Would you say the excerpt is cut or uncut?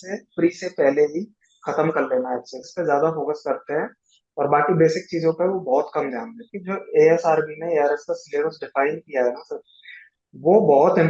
cut